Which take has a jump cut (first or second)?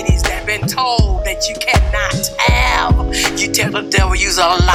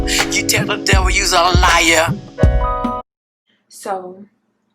second